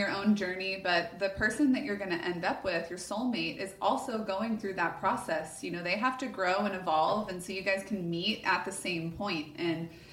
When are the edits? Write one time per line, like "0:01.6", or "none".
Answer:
none